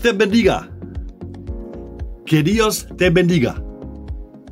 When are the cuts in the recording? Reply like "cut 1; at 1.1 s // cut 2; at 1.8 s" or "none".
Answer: cut 1; at 0.9 s // cut 2; at 2.2 s // cut 3; at 3.6 s